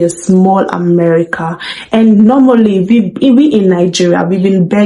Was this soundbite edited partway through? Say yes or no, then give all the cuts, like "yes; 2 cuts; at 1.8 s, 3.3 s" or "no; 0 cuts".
no; 0 cuts